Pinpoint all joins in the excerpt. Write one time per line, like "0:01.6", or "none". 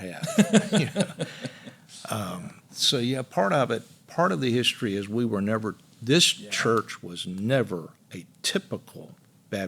0:02.7